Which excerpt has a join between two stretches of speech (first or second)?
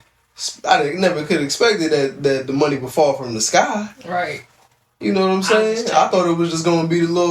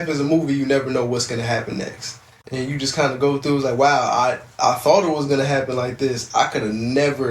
second